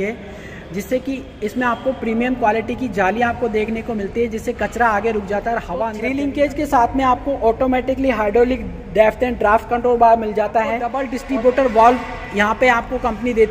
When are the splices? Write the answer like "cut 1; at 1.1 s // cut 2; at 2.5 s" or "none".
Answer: cut 1; at 6.0 s // cut 2; at 11.1 s